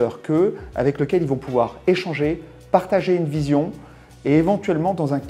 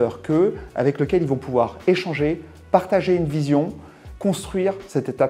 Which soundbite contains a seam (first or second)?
second